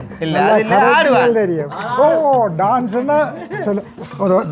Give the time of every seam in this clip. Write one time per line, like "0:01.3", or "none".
none